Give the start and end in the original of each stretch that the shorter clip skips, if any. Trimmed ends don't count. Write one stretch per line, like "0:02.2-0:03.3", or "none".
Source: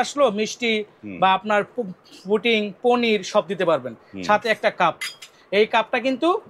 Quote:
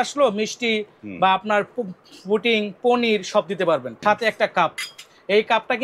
0:03.9-0:04.1